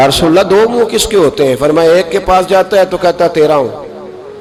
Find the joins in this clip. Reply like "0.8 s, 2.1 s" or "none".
none